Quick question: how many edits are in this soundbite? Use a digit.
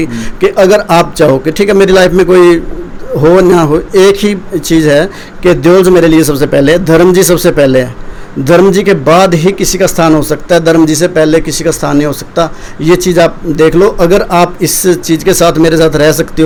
0